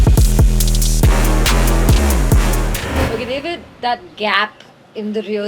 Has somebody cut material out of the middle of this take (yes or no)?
yes